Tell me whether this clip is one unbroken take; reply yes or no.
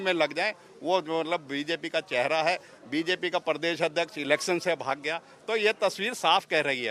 yes